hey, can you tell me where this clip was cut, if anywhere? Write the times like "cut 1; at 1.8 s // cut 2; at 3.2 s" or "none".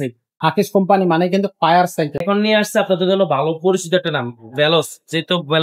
cut 1; at 2.2 s